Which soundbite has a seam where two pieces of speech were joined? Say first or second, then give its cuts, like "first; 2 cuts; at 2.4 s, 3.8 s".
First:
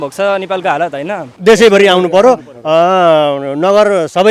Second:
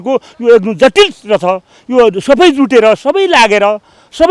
first; 1 cut; at 1.3 s